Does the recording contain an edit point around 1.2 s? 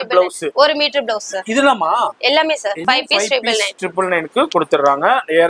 no; 1 cut; at 2.8 s

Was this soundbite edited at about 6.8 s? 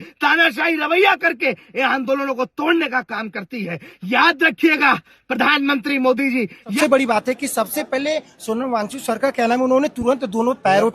yes; 1 cut; at 6.8 s

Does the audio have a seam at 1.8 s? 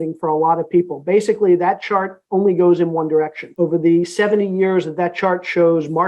no; 1 cut; at 3.4 s

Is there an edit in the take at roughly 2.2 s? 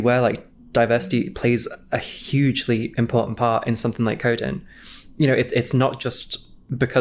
yes; 1 cut; at 2.2 s

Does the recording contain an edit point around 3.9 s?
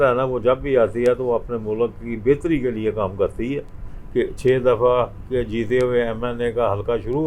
yes; 1 cut; at 3.9 s

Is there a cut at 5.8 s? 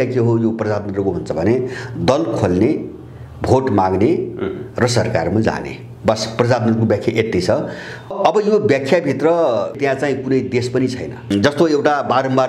no; 3 cuts; at 8.1 s, 9.8 s, 11.3 s

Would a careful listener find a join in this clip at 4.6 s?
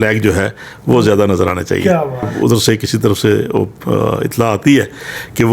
no; 1 cut; at 2.3 s

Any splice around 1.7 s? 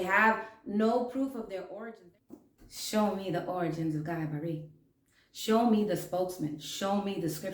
yes; 1 cut; at 1.7 s

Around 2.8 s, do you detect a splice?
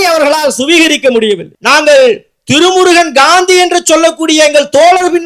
no; 1 cut; at 1.5 s

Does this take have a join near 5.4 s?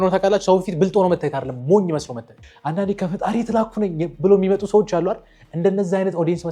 no; 1 cut; at 2.4 s

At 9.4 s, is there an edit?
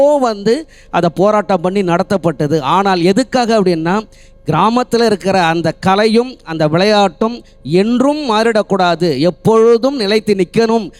no; 0 cuts

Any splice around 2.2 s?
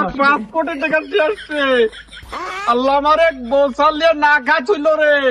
no; 0 cuts

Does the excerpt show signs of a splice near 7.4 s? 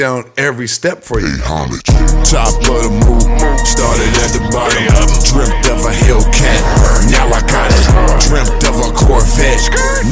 no; 1 cut; at 1.3 s

